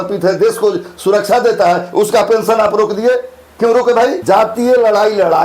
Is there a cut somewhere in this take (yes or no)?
yes